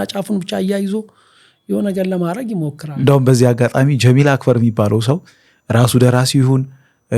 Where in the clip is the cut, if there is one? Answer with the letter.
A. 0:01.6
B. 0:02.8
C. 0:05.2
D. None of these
B